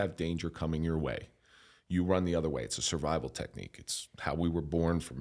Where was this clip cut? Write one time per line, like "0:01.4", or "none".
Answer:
none

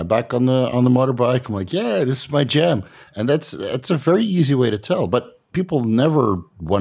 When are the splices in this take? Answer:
none

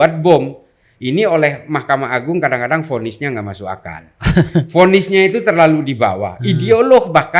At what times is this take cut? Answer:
none

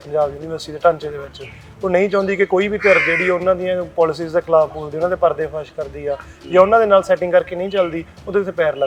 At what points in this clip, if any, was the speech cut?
none

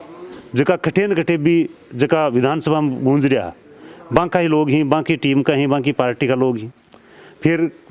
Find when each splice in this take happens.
none

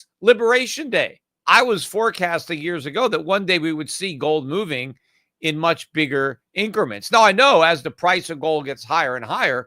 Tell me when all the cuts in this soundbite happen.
0:01.3

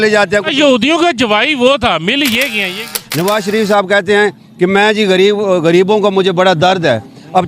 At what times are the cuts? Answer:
0:03.0

